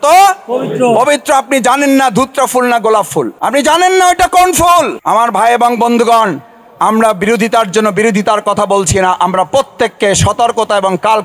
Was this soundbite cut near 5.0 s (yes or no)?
yes